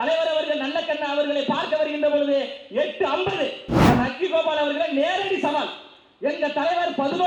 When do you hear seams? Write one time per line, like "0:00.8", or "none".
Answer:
0:03.7